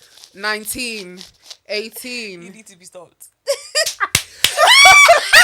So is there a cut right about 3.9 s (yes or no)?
yes